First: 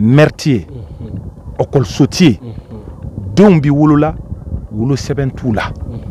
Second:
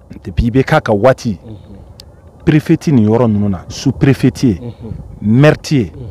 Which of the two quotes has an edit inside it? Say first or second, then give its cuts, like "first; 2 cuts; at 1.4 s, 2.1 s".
second; 1 cut; at 3.6 s